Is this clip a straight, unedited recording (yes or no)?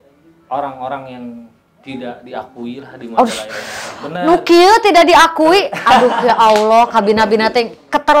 yes